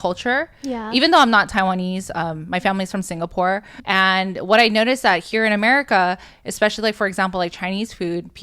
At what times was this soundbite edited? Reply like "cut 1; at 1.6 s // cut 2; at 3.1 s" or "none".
cut 1; at 3.7 s